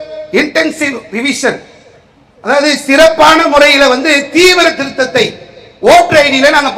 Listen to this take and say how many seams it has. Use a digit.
0